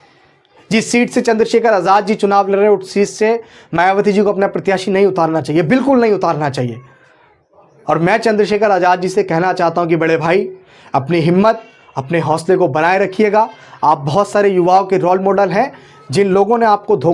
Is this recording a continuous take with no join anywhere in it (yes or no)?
yes